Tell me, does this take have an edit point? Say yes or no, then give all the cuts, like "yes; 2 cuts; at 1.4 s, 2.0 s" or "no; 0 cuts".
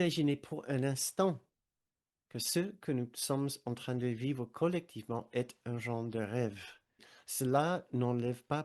yes; 1 cut; at 7.1 s